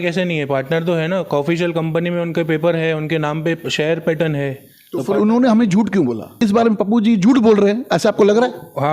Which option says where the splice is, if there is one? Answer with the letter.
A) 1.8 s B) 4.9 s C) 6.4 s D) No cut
C